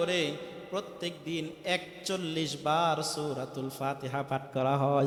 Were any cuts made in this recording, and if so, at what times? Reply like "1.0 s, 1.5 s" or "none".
none